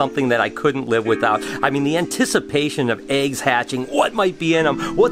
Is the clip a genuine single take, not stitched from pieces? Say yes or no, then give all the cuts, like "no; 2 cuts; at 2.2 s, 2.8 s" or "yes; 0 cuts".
yes; 0 cuts